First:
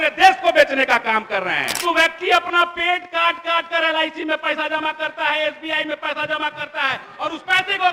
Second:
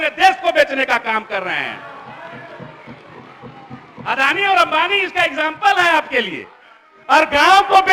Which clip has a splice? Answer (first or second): first